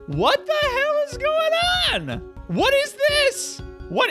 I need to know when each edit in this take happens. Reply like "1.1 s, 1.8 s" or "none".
none